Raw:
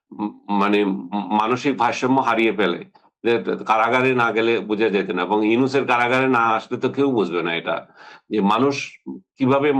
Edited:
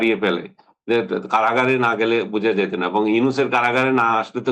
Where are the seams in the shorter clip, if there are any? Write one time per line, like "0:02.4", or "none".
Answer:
none